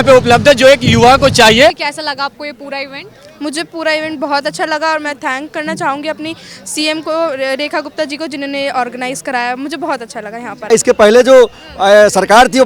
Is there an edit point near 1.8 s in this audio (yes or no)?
yes